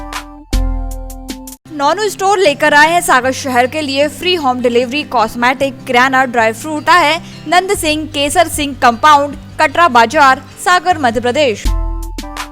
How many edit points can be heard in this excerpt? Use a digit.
3